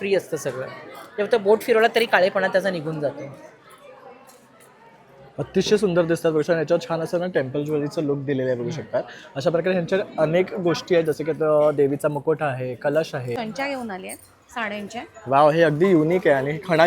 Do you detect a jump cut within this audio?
yes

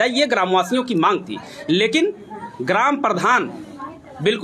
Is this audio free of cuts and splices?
yes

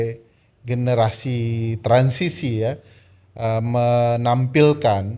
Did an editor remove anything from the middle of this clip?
no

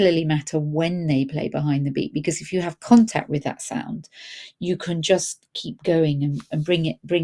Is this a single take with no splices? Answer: yes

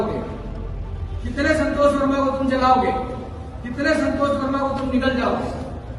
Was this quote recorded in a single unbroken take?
yes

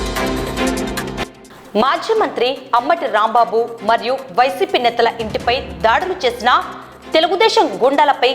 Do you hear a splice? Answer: no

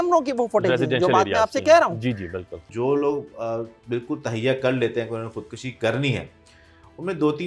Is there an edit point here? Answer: yes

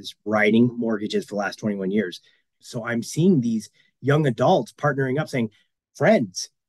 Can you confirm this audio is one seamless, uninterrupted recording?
no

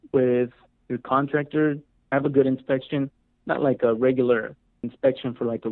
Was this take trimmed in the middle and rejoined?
no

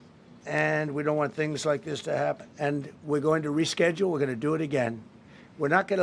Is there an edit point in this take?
yes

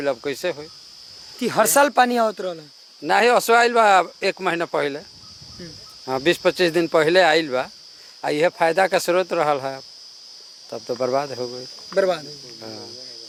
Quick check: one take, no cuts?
yes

